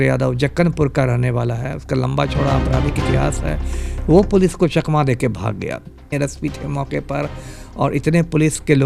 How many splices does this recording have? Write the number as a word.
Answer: one